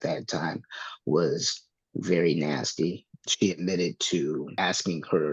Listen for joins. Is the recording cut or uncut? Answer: cut